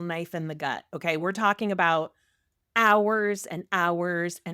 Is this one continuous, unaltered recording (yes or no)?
yes